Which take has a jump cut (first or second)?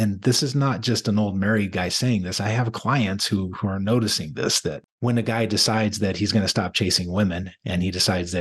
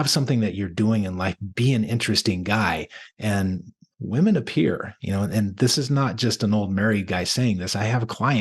first